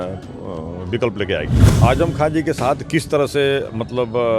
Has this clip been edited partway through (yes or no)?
yes